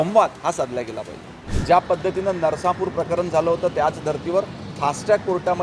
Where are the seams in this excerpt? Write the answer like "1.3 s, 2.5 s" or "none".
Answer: 1.5 s